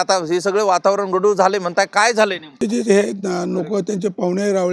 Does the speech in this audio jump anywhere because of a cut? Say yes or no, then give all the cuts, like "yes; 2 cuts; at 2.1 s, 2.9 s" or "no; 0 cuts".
yes; 1 cut; at 2.6 s